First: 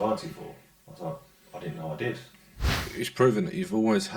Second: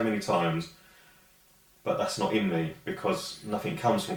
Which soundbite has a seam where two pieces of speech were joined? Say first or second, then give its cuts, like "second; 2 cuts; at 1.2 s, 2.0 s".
first; 1 cut; at 2.7 s